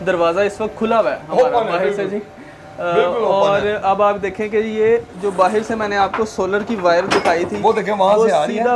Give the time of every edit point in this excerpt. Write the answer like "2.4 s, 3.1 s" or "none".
none